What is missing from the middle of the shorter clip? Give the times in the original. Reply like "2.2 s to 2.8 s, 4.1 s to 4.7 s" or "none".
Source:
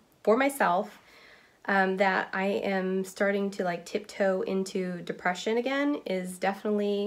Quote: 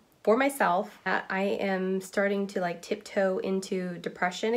1.1 s to 2.1 s